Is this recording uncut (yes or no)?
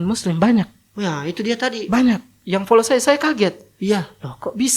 yes